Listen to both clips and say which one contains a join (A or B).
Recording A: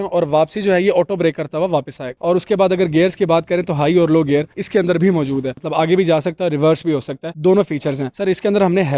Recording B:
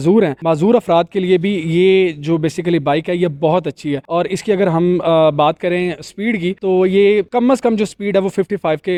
A